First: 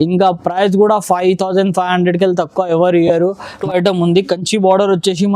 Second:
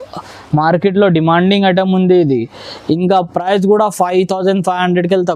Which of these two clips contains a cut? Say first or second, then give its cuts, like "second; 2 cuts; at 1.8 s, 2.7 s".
first; 1 cut; at 3.5 s